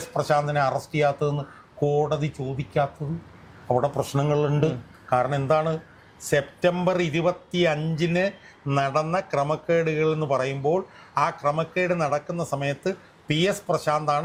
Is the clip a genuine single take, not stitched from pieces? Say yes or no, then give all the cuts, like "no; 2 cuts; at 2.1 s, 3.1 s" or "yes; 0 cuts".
yes; 0 cuts